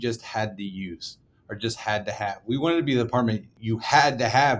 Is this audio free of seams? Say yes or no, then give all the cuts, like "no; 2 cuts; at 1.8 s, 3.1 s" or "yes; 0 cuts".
no; 1 cut; at 3.5 s